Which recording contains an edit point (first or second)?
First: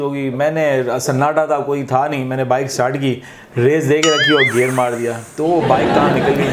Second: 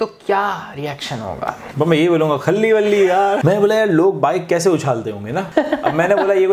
second